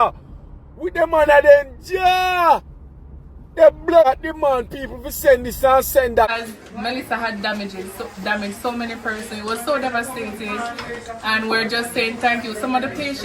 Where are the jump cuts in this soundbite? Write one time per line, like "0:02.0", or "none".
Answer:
0:04.1
0:06.3